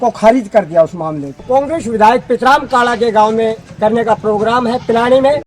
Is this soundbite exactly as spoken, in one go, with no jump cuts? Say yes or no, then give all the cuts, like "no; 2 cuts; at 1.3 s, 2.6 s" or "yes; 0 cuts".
no; 2 cuts; at 1.4 s, 3.7 s